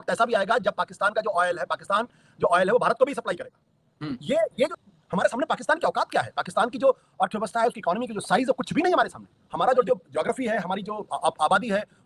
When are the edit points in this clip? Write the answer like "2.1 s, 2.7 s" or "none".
4.7 s, 9.9 s